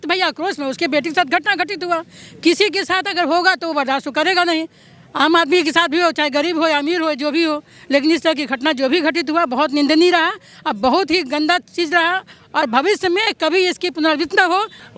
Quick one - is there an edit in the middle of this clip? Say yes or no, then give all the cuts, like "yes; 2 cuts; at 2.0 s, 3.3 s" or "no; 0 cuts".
no; 0 cuts